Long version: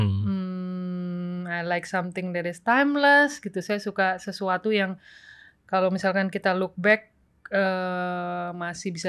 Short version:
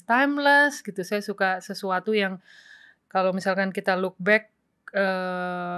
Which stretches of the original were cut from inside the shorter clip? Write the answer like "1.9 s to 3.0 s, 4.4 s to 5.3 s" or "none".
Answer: none